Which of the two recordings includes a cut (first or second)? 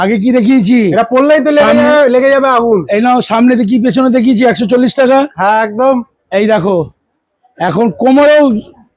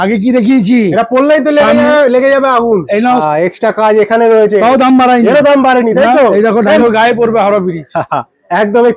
second